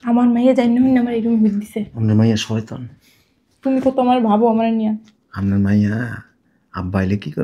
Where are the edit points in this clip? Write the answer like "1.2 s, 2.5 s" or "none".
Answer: none